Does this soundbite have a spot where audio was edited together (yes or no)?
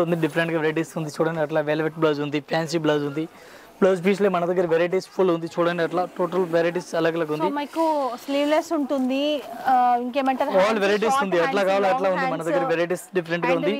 no